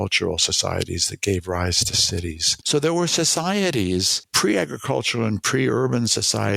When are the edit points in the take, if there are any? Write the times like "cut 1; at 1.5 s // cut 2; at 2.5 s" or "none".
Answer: cut 1; at 2.5 s // cut 2; at 4.2 s